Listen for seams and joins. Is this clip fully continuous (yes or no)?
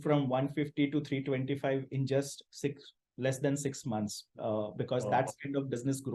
yes